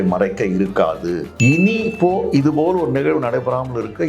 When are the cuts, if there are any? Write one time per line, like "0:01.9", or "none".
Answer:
0:01.3